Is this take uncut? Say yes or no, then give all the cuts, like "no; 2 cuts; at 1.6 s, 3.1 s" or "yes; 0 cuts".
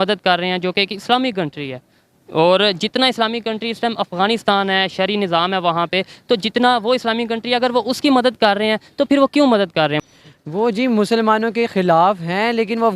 no; 1 cut; at 10.0 s